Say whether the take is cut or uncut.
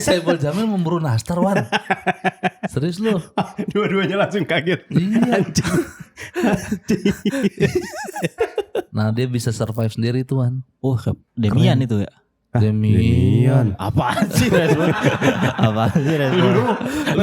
cut